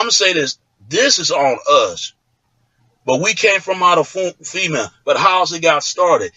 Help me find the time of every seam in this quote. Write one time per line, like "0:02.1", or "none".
0:01.2